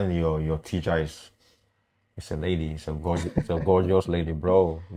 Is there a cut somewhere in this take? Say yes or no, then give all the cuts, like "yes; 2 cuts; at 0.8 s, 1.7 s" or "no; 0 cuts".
no; 0 cuts